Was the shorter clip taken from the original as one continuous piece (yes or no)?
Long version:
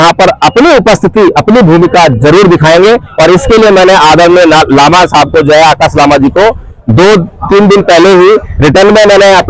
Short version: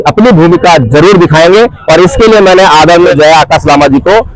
no